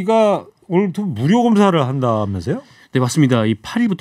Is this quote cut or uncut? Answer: uncut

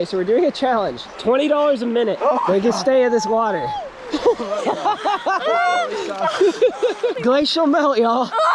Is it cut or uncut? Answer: cut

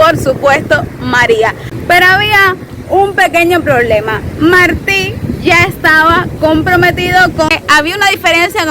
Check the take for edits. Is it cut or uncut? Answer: cut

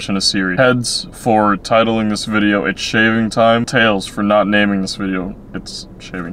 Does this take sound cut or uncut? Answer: uncut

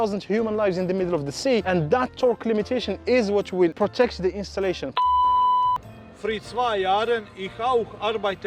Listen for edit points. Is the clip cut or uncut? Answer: cut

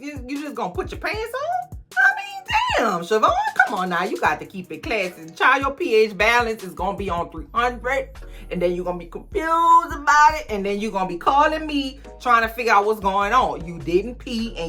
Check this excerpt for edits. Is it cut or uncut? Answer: cut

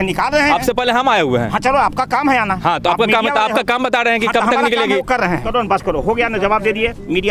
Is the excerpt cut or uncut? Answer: cut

